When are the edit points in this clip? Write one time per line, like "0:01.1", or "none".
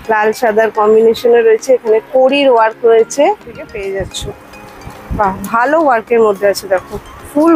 0:03.6